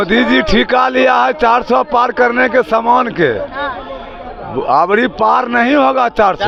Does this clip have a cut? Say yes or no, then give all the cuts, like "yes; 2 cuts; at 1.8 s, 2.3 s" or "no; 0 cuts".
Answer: no; 0 cuts